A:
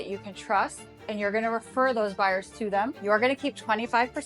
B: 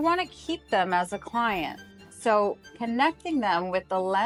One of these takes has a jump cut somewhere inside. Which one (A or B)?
A